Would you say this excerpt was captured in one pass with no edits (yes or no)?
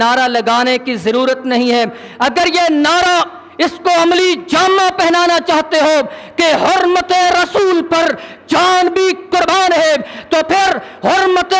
yes